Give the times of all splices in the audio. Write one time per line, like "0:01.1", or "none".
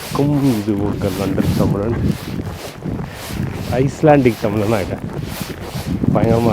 none